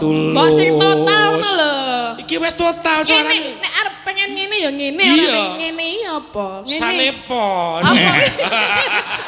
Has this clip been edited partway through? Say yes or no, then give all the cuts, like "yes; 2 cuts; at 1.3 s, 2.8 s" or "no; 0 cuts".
no; 0 cuts